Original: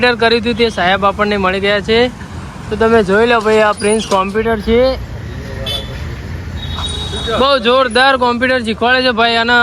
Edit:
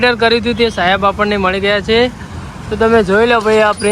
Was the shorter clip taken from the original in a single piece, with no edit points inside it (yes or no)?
yes